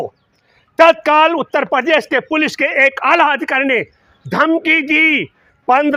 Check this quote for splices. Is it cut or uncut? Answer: uncut